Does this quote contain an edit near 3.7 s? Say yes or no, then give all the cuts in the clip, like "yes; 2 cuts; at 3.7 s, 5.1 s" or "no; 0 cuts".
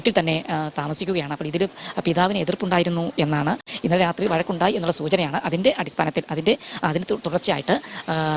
yes; 1 cut; at 3.7 s